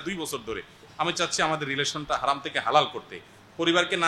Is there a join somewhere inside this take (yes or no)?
no